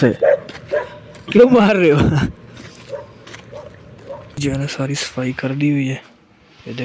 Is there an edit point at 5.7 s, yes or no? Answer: no